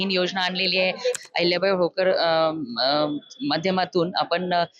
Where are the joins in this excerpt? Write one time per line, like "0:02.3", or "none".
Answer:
0:01.2